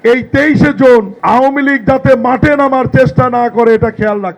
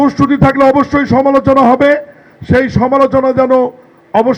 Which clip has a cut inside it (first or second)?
first